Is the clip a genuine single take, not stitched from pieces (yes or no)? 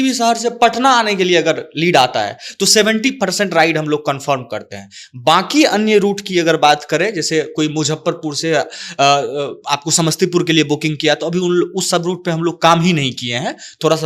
yes